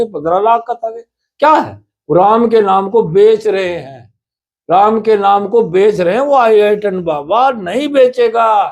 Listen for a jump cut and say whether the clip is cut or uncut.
uncut